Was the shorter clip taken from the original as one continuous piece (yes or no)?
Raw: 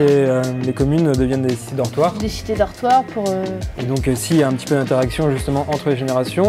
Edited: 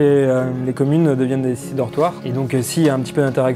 no